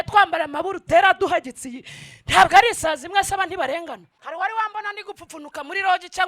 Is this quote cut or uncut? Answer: cut